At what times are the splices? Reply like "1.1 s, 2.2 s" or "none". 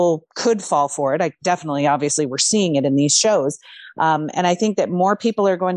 none